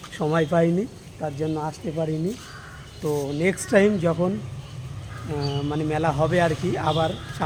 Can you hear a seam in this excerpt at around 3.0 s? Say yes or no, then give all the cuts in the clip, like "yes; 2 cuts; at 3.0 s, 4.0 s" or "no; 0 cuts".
no; 0 cuts